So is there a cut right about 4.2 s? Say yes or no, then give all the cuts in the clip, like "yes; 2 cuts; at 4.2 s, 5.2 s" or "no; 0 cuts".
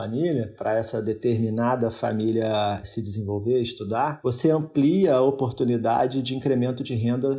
yes; 2 cuts; at 2.9 s, 4.2 s